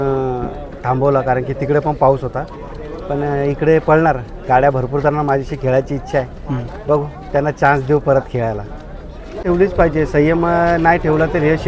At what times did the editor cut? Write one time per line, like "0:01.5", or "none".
0:09.4